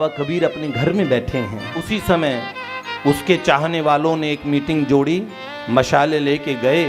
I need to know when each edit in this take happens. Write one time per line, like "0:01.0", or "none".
0:01.9